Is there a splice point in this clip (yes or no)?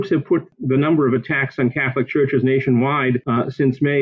no